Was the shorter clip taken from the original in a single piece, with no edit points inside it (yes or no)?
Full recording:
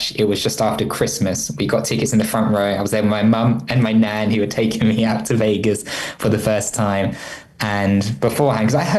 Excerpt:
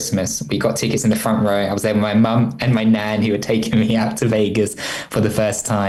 yes